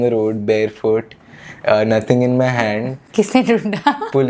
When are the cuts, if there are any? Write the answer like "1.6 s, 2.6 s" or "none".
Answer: none